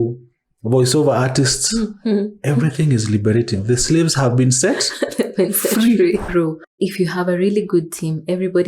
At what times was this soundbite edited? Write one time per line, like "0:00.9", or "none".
0:06.7

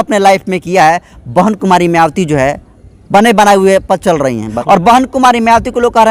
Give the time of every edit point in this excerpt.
0:04.5

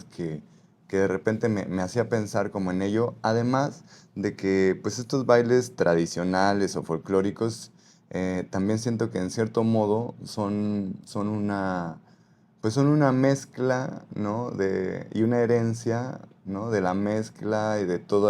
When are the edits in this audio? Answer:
none

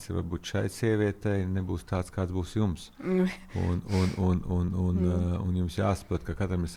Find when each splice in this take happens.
none

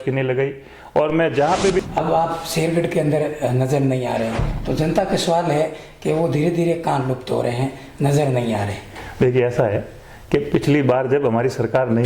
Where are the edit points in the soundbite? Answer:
0:01.8

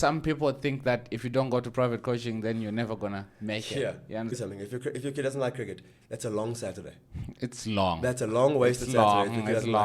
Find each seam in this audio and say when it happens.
0:04.3

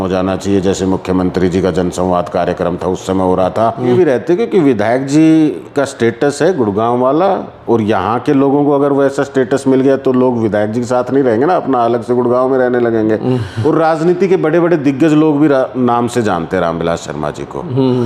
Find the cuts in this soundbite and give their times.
0:03.9
0:13.5

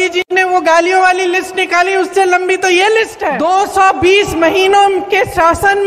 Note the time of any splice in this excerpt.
0:03.2

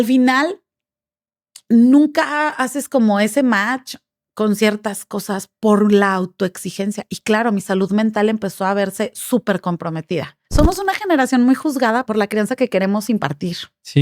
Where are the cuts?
0:10.4
0:12.0

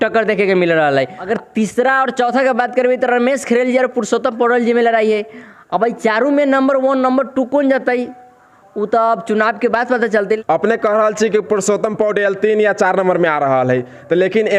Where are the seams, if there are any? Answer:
none

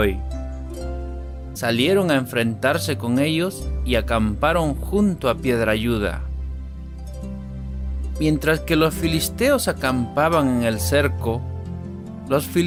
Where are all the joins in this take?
none

